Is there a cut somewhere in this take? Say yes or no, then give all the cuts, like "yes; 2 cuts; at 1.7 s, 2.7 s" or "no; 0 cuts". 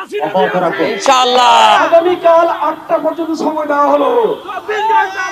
yes; 1 cut; at 1.8 s